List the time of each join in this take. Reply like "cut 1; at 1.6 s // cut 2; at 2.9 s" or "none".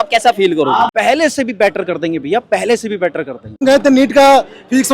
cut 1; at 0.9 s // cut 2; at 3.6 s